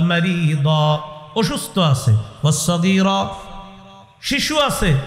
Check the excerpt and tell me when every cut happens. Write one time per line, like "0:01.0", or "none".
none